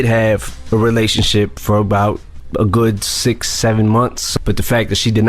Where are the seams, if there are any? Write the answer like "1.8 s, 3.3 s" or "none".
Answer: 2.3 s, 4.2 s